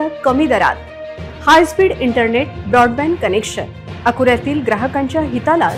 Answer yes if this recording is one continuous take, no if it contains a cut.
yes